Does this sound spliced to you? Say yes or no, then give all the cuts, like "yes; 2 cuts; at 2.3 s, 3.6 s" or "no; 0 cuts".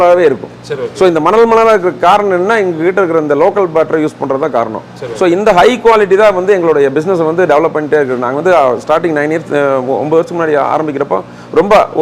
no; 0 cuts